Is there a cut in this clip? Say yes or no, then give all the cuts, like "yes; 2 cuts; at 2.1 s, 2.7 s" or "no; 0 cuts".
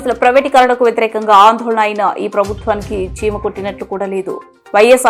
no; 0 cuts